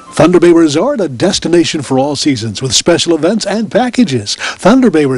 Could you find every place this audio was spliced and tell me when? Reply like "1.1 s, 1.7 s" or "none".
none